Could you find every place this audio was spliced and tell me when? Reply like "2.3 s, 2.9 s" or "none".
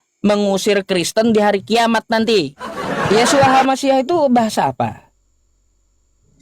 3.1 s